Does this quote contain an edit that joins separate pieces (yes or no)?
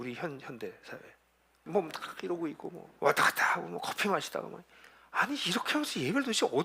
yes